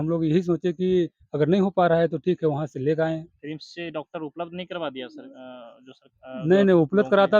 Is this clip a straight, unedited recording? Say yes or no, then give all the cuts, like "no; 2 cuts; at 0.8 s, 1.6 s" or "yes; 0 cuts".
yes; 0 cuts